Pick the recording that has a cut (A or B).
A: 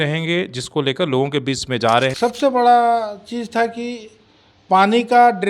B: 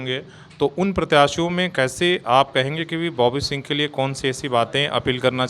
A